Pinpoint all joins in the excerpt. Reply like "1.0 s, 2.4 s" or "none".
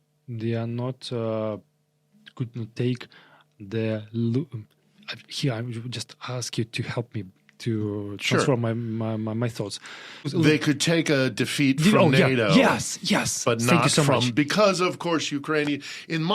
10.3 s